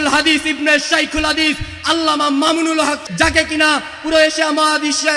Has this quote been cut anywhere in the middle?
yes; 1 cut; at 3.0 s

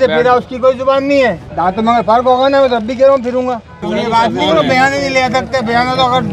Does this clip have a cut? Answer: yes; 2 cuts; at 1.5 s, 3.8 s

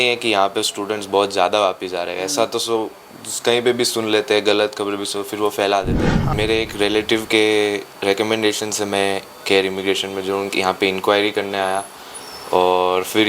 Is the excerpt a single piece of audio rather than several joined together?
no; 1 cut; at 6.1 s

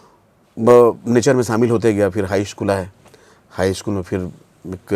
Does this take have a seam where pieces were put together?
no; 0 cuts

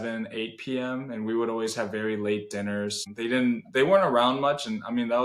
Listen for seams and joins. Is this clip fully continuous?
no; 1 cut; at 3.1 s

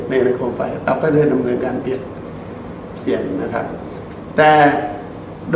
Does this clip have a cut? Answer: no; 0 cuts

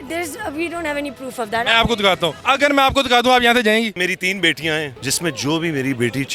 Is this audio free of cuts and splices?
no; 3 cuts; at 2.4 s, 4.0 s, 5.0 s

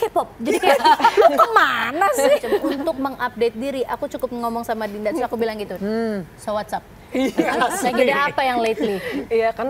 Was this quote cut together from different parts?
yes; 1 cut; at 2.7 s

